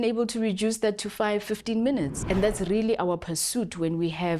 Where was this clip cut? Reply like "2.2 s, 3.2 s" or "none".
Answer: 2.2 s